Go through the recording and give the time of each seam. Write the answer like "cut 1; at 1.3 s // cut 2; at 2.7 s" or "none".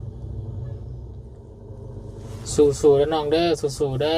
cut 1; at 1.3 s